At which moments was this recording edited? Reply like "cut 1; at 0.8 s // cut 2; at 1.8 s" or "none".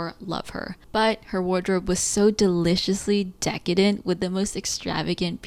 none